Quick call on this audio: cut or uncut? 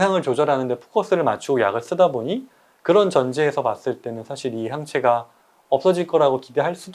uncut